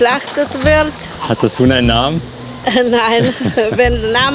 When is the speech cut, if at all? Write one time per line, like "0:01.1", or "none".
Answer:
0:01.2